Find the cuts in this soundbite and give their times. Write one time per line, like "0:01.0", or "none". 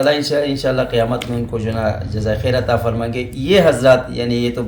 none